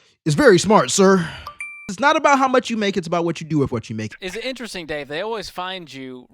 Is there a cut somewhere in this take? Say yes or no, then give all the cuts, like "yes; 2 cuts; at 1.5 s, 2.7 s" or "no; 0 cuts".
yes; 2 cuts; at 1.9 s, 4.1 s